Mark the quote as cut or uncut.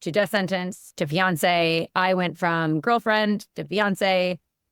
uncut